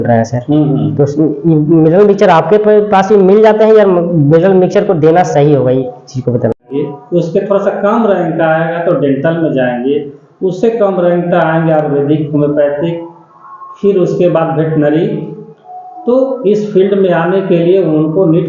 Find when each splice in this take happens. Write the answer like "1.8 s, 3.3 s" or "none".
6.5 s